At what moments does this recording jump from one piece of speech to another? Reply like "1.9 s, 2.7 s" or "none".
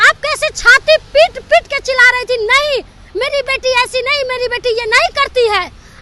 none